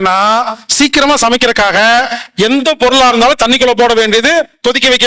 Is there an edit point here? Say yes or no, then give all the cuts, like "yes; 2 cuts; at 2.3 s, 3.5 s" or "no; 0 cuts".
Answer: no; 0 cuts